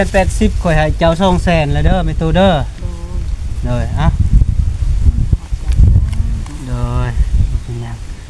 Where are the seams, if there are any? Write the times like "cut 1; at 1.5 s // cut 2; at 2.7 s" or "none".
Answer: none